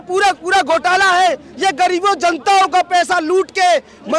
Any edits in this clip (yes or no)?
no